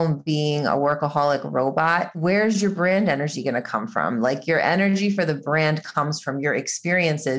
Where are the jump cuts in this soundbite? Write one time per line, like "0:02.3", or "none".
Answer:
0:02.1